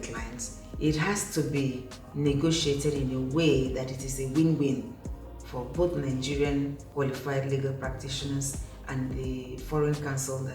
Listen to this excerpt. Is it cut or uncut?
cut